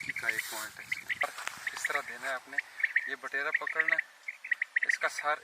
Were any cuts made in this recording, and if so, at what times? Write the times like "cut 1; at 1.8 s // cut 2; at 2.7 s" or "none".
cut 1; at 1.2 s